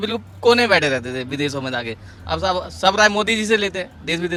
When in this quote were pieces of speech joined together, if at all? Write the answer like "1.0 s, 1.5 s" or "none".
none